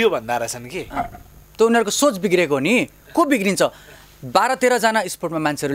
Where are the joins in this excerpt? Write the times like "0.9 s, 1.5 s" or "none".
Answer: none